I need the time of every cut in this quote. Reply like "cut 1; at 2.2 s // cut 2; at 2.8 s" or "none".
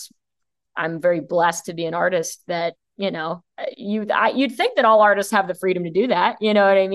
cut 1; at 3.5 s